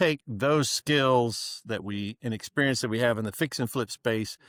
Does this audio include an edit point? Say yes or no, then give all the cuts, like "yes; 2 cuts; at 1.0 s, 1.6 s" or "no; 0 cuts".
no; 0 cuts